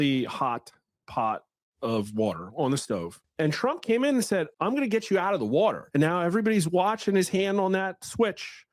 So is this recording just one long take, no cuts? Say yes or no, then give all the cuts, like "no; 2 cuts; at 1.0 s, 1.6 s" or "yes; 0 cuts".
no; 3 cuts; at 3.2 s, 4.5 s, 5.8 s